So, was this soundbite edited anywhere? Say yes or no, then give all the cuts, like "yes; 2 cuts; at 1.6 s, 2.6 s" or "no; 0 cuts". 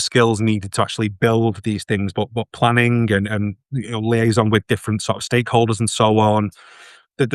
no; 0 cuts